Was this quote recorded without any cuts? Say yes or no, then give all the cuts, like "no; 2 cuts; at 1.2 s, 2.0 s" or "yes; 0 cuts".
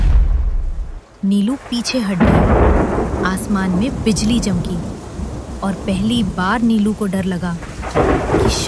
yes; 0 cuts